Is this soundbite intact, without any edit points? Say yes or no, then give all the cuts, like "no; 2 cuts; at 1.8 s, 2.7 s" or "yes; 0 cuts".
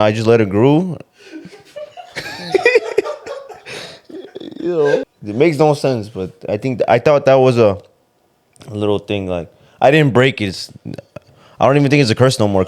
no; 1 cut; at 5.0 s